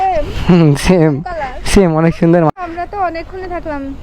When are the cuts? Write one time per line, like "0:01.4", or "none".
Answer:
0:02.5